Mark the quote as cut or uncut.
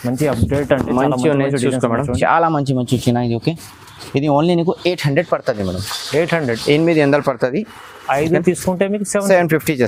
uncut